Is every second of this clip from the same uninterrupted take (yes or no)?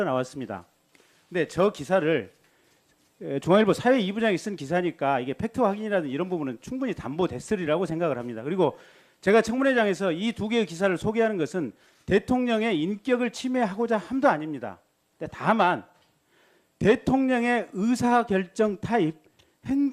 yes